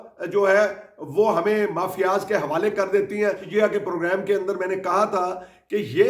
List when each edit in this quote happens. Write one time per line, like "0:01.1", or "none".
0:03.4